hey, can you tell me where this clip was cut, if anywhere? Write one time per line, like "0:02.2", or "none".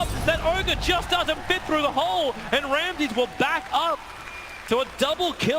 0:02.6